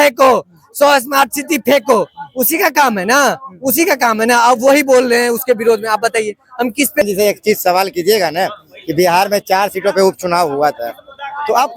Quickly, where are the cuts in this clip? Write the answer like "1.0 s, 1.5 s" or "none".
7.0 s